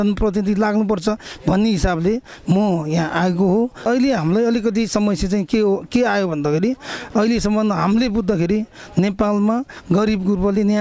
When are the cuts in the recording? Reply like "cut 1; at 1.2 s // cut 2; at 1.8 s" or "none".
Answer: cut 1; at 3.8 s